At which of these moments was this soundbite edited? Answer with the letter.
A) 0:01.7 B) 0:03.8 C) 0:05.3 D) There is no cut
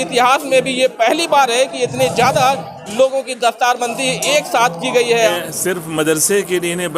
C